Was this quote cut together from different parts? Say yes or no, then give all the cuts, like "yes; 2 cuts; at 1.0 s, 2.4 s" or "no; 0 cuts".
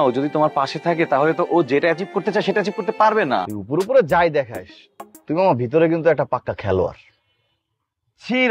yes; 1 cut; at 3.5 s